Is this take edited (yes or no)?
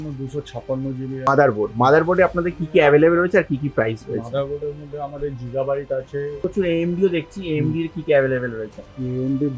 yes